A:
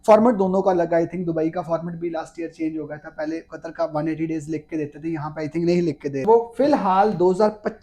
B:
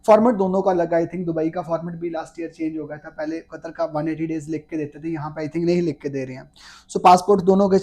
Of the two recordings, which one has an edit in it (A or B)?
A